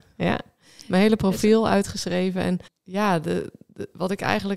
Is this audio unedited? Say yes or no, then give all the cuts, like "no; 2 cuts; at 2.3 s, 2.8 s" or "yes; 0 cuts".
no; 1 cut; at 2.8 s